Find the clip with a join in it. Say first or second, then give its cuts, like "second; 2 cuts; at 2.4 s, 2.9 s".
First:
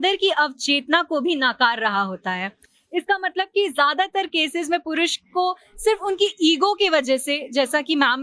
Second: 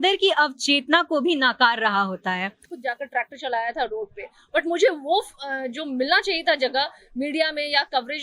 second; 1 cut; at 2.6 s